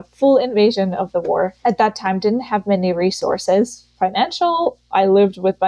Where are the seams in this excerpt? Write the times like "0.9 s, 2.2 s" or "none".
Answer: 1.6 s